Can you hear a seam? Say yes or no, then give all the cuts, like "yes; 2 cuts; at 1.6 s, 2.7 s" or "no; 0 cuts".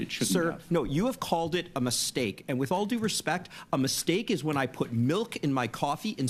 no; 0 cuts